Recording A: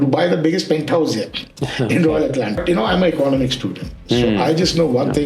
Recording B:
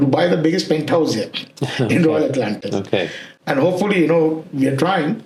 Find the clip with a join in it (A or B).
A